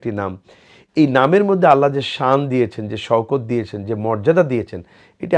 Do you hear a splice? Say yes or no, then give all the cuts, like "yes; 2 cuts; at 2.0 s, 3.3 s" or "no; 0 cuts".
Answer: no; 0 cuts